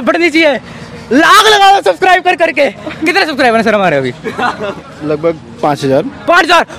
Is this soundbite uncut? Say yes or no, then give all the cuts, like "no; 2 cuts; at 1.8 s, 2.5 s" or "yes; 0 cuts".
yes; 0 cuts